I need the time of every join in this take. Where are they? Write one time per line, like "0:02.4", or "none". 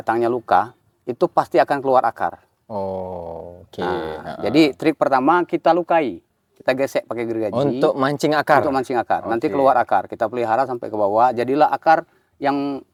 none